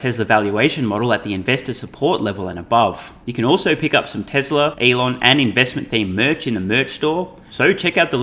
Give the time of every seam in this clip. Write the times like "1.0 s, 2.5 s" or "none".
3.2 s, 4.8 s, 7.4 s